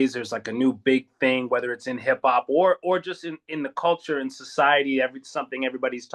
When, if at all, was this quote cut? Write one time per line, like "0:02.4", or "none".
none